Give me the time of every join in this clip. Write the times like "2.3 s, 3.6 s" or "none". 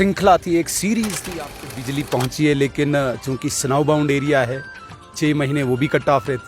1.2 s

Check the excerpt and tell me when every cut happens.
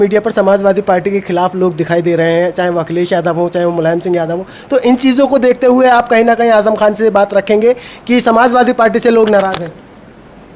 none

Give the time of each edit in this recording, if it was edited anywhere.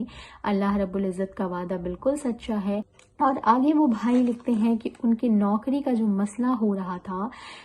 2.9 s

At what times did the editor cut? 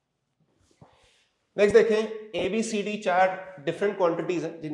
none

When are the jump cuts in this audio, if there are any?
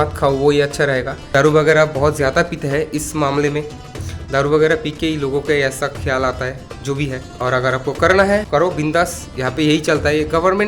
1.2 s, 7.2 s, 8.5 s

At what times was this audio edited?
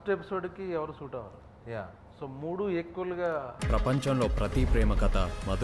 3.6 s

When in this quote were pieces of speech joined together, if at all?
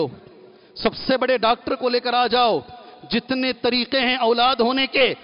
none

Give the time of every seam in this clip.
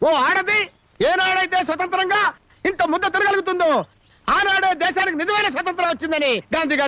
none

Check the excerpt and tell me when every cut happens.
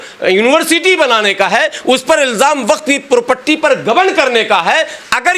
none

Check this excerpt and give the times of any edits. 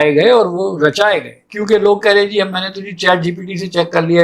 1.3 s

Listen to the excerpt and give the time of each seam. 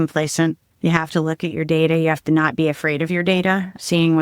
none

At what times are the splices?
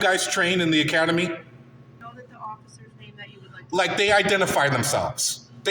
2.0 s

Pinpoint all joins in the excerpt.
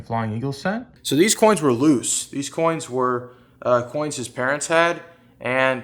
0.9 s

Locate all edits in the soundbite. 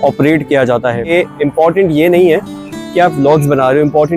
1.1 s

